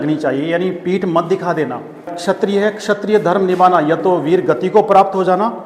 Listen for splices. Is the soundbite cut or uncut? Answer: cut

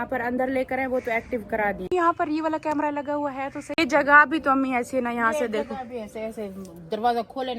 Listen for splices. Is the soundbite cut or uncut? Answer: cut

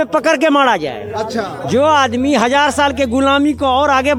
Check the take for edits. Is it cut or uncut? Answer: uncut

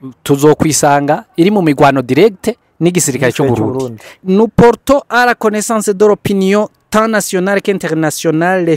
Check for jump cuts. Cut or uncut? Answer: cut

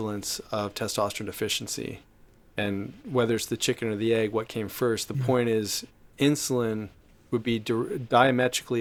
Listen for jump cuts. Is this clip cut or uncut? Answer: uncut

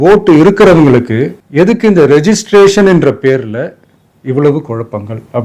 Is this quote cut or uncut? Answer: uncut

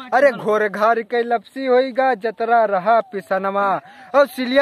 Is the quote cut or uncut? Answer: uncut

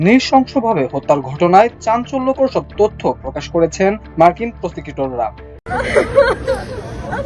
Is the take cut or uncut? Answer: cut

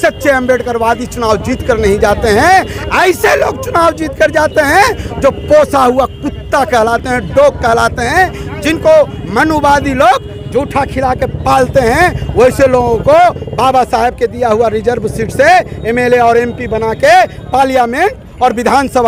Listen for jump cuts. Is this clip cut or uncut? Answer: uncut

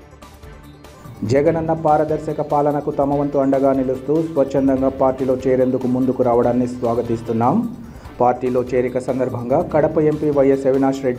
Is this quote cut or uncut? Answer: uncut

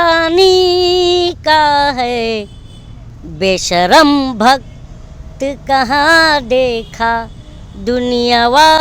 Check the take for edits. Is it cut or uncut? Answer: uncut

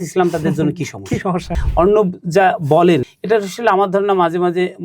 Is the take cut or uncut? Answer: cut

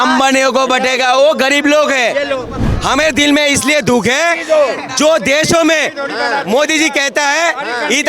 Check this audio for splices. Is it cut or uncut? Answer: cut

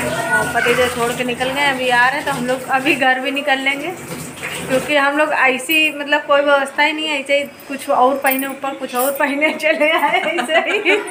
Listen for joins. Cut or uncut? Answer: uncut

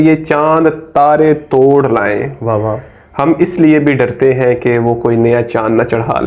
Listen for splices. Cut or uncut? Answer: uncut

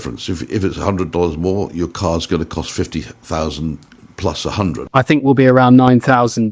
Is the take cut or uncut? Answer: cut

